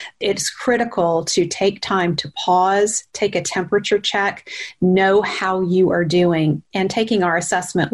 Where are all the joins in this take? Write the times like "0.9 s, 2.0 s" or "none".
none